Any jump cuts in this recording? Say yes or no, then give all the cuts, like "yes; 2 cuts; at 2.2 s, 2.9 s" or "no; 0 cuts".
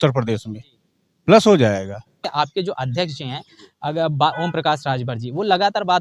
yes; 1 cut; at 2.3 s